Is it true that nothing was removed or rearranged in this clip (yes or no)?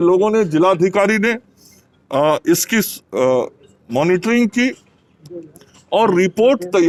yes